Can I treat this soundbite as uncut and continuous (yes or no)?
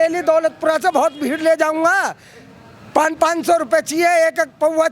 yes